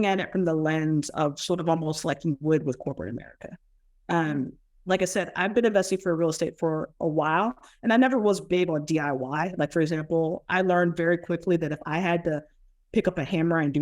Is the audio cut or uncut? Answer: uncut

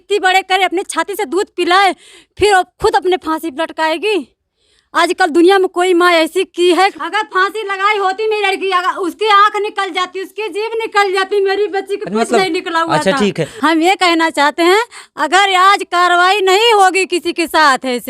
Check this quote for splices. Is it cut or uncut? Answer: cut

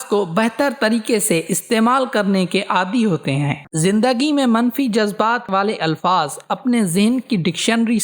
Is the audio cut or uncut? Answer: cut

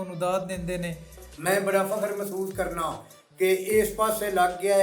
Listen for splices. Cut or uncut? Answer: cut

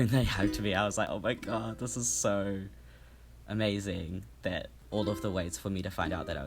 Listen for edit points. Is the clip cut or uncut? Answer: cut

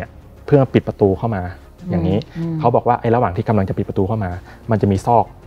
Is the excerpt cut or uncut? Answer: uncut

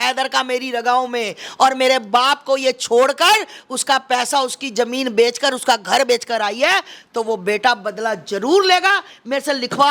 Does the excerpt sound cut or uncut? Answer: uncut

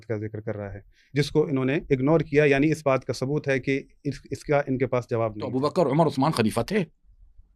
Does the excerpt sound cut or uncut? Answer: cut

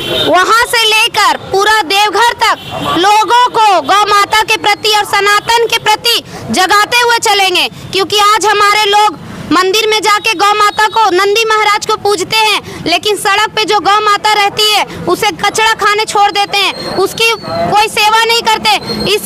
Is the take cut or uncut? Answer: uncut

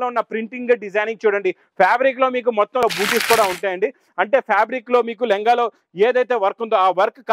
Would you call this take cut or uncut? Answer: cut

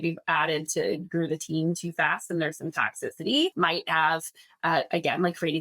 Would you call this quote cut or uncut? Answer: cut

